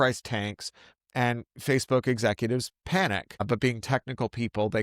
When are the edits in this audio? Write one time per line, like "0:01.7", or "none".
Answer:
0:03.4

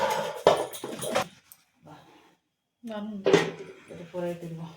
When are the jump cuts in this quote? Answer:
0:01.2

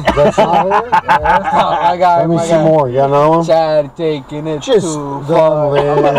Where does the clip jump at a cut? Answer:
none

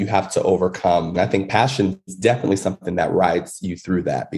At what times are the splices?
0:01.1

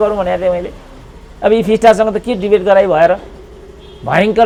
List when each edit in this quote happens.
none

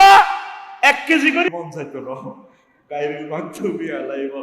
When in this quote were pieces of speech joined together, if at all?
0:01.5

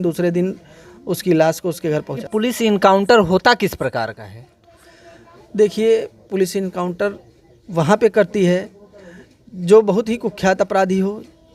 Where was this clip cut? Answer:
0:02.2

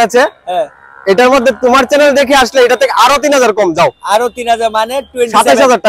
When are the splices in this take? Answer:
none

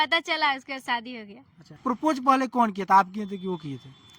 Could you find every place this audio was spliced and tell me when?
0:01.8

